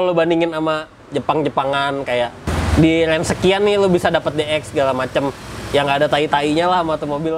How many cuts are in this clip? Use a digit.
2